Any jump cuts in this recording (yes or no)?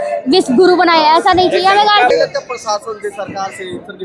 yes